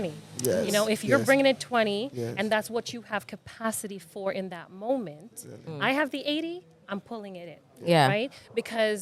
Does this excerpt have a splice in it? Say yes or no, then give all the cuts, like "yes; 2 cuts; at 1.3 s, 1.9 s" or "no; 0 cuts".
no; 0 cuts